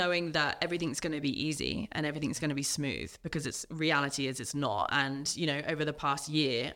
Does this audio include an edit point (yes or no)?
no